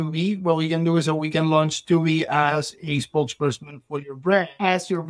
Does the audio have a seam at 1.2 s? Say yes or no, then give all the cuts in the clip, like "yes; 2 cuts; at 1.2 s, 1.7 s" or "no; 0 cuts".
no; 0 cuts